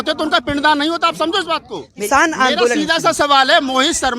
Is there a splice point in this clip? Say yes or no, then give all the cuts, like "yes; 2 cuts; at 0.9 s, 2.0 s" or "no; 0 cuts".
yes; 1 cut; at 1.9 s